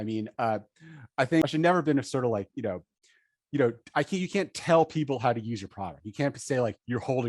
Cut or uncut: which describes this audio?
cut